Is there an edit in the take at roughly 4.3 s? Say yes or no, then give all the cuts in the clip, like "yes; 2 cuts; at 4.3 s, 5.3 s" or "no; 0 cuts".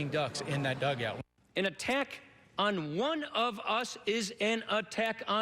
no; 1 cut; at 1.2 s